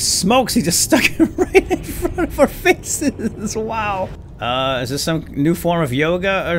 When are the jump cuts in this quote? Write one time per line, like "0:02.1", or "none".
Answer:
0:04.2